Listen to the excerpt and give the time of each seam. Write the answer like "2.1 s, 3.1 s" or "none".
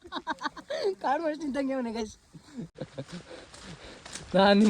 2.7 s